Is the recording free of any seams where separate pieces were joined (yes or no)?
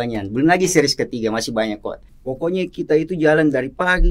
no